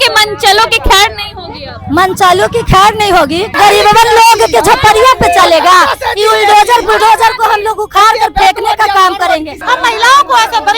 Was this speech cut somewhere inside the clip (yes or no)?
yes